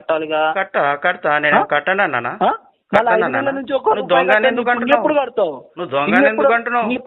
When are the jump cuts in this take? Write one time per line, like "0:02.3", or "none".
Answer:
none